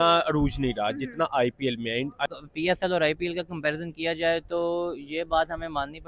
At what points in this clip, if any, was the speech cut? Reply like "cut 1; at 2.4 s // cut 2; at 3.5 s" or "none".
cut 1; at 2.3 s